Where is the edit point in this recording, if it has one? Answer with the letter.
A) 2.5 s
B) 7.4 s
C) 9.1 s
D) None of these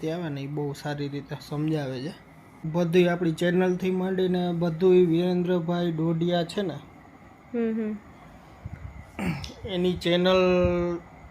A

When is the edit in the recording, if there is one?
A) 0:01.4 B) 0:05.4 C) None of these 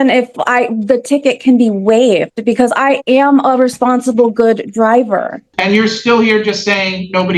B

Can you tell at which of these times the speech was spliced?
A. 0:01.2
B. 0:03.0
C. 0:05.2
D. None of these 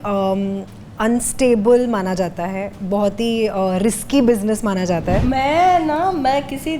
C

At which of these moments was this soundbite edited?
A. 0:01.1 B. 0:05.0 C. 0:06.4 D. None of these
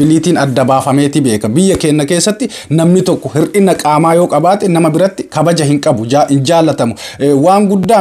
D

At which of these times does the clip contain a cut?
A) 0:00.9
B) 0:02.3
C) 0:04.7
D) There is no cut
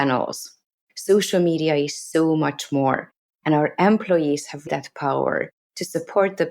C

